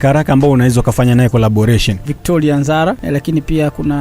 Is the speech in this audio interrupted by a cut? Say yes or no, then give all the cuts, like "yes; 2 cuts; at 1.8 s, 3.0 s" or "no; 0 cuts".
yes; 2 cuts; at 2.1 s, 3.0 s